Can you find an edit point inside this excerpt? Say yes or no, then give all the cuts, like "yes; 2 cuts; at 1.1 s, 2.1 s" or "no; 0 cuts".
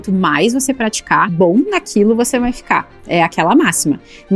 yes; 1 cut; at 0.9 s